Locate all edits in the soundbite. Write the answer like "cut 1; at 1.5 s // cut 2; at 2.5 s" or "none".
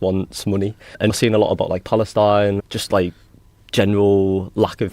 cut 1; at 1.1 s // cut 2; at 2.6 s